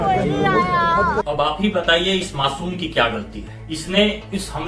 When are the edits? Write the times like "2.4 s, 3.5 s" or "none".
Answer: 1.2 s